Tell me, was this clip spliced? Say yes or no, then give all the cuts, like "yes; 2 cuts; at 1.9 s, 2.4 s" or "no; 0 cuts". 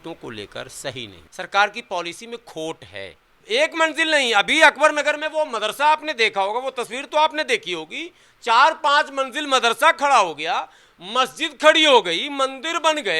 yes; 2 cuts; at 1.2 s, 3.3 s